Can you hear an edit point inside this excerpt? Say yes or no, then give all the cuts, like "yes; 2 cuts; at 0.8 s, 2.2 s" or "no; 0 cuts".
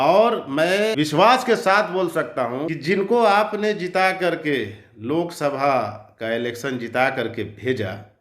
yes; 2 cuts; at 0.9 s, 2.7 s